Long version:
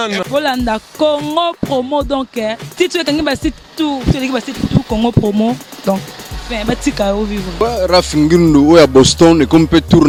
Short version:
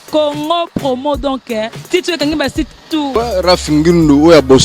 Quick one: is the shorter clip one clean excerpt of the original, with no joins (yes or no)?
no